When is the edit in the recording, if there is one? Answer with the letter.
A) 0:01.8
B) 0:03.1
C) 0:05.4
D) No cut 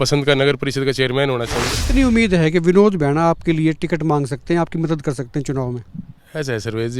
A